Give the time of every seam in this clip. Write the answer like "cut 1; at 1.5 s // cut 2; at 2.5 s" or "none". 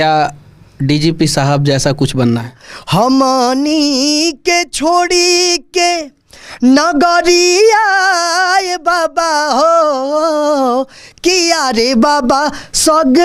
cut 1; at 2.6 s